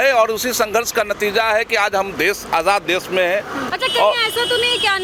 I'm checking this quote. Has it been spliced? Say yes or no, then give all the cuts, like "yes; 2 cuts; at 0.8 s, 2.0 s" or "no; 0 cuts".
no; 0 cuts